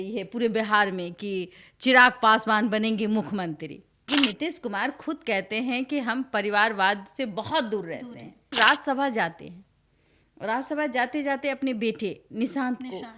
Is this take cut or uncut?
cut